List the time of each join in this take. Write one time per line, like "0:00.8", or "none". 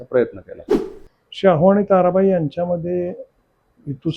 0:01.0